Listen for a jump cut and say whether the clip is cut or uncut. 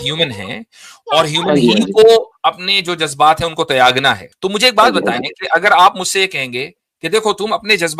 cut